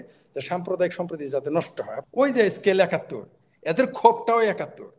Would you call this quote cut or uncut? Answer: cut